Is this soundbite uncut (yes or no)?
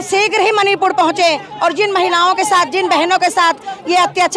yes